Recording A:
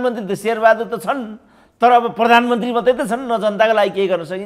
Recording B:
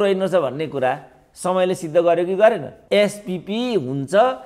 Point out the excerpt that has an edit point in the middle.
B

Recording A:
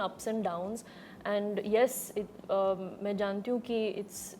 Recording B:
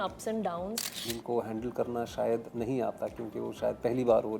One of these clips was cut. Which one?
B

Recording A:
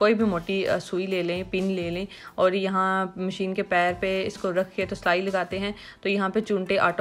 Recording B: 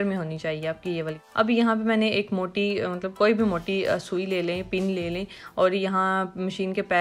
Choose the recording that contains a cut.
B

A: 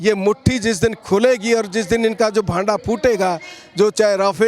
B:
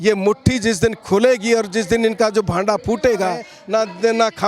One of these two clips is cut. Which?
B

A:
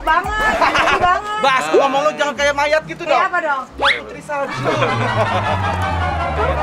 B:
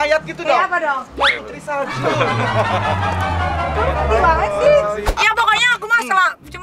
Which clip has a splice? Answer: B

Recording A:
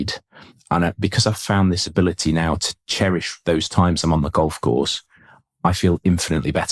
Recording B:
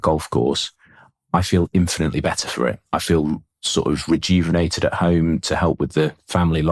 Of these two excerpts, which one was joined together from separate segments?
A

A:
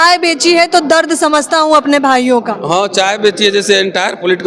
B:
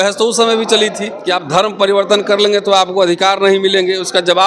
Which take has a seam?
B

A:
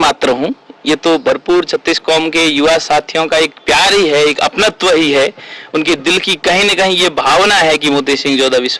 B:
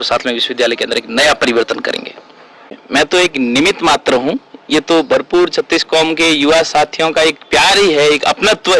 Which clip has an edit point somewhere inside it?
B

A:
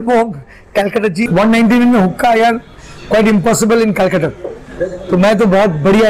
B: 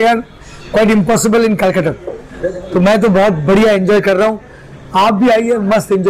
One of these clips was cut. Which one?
A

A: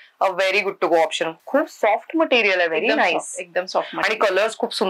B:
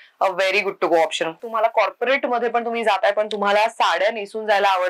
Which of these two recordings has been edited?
B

